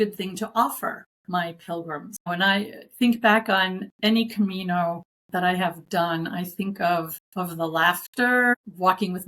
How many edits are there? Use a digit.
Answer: 6